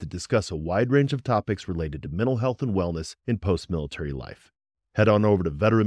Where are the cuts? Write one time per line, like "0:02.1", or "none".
none